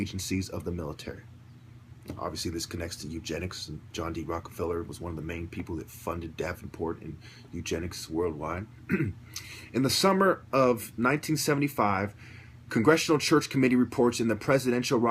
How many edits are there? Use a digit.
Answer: 1